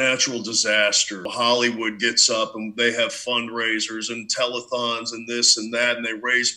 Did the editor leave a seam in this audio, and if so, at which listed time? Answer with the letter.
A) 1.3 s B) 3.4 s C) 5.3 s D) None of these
A